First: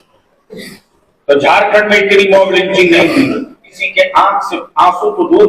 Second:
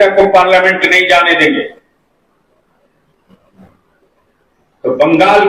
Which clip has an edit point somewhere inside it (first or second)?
first